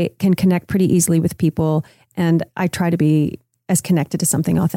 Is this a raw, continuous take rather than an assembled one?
no; 1 cut; at 2.5 s

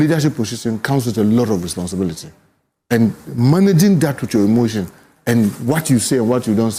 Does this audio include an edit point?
no; 0 cuts

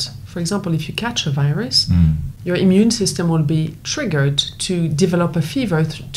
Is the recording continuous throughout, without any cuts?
no; 1 cut; at 2.3 s

